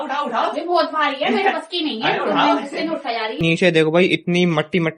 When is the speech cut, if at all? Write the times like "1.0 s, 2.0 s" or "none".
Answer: 3.4 s